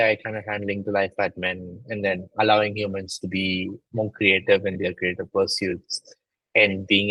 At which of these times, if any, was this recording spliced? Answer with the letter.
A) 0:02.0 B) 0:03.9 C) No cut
C